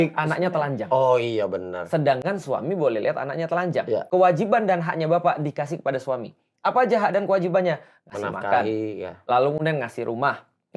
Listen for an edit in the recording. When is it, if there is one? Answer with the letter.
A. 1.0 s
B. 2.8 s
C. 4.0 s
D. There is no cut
C